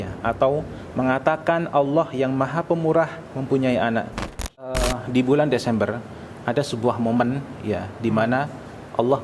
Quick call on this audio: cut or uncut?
cut